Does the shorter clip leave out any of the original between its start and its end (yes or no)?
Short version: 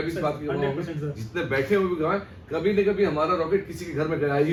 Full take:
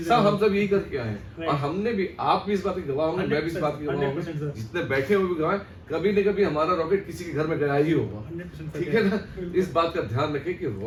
no